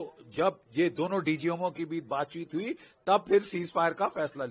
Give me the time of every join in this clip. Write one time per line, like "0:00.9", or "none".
none